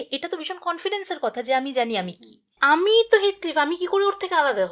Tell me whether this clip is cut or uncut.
cut